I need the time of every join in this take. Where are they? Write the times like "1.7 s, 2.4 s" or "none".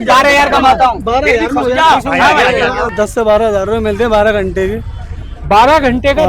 2.9 s